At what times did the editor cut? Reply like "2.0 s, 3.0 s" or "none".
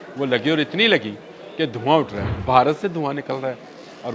2.2 s

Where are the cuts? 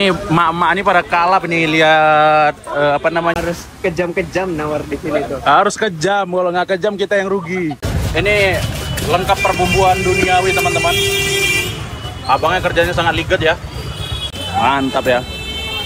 3.3 s, 7.8 s, 14.3 s

